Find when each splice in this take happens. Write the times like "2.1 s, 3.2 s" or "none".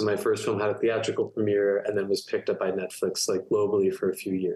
none